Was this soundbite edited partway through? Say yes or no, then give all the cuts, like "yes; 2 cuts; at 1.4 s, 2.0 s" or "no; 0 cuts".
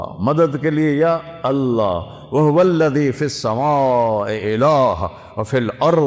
no; 0 cuts